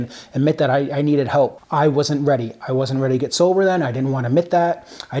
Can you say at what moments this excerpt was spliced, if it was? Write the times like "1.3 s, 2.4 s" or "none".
1.6 s

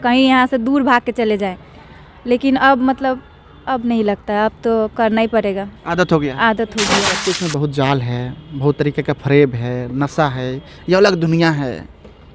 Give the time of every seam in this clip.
7.1 s

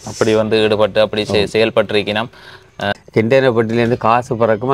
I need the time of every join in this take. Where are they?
2.9 s

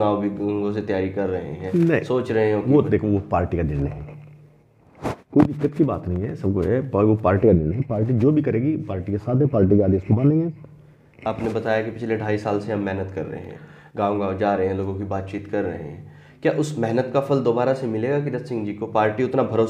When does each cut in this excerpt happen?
none

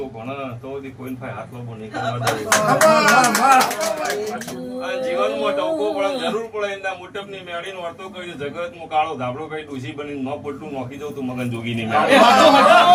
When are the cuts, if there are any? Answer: none

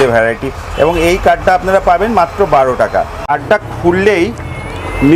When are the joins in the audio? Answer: 3.3 s

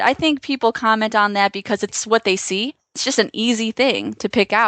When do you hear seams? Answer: 2.0 s, 3.0 s

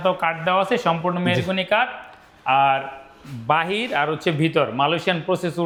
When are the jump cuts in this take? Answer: none

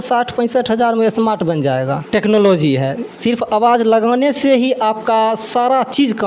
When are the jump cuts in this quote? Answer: 2.0 s

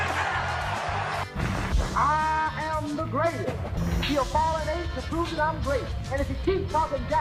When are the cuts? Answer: none

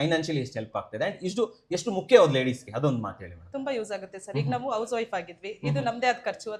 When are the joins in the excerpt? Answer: none

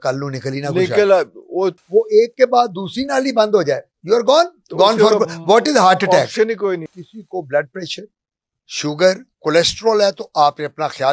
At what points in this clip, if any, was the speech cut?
1.8 s, 6.9 s

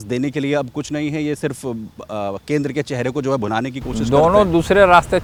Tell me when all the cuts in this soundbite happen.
none

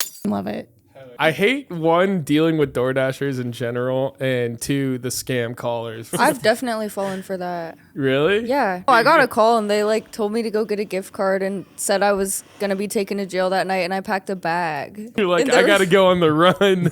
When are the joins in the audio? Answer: 1.0 s, 6.1 s, 8.9 s, 15.2 s

